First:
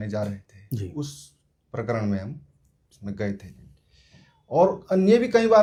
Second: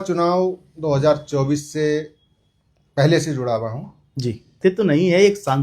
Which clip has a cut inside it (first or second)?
second